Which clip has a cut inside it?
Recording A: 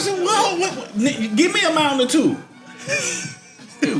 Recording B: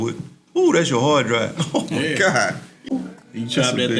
B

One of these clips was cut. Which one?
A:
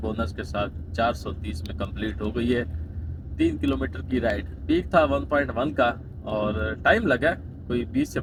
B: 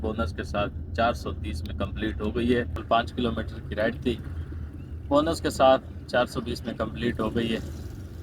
B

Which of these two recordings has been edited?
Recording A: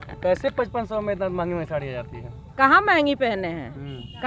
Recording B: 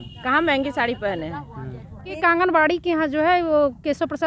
B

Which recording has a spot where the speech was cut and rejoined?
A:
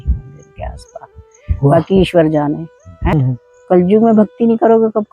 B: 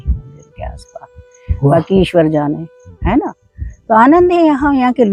A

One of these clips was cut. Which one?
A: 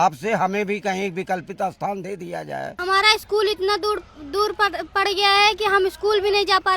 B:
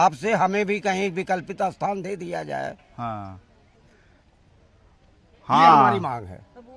A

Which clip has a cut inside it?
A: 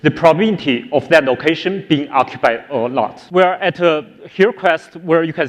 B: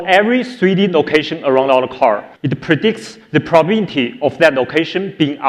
A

